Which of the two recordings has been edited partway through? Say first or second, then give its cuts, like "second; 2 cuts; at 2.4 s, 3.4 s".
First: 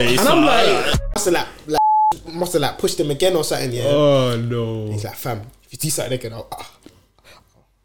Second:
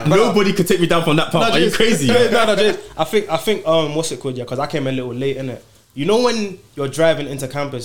first; 1 cut; at 0.9 s